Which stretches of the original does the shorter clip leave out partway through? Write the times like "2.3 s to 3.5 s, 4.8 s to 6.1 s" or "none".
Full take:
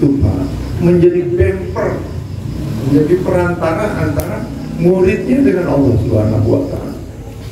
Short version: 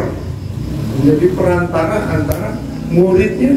none